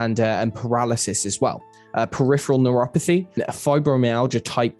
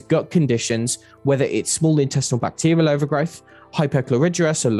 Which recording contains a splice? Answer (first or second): first